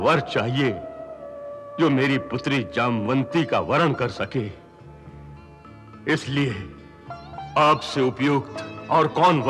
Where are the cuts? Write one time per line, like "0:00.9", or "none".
none